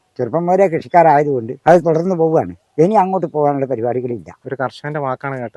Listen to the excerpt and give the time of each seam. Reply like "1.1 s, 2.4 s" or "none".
1.5 s, 4.4 s